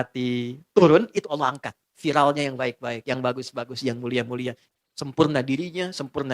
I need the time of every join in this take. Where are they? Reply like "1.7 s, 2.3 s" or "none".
4.6 s